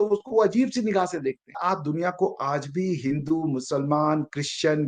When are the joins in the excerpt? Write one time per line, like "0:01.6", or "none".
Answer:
0:01.6